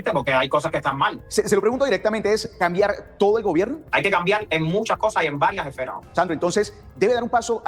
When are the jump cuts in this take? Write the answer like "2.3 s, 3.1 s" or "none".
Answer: 1.2 s, 3.8 s, 6.0 s